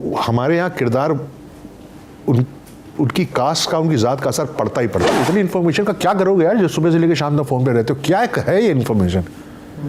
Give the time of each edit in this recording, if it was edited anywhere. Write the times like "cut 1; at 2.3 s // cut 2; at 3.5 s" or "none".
cut 1; at 5.1 s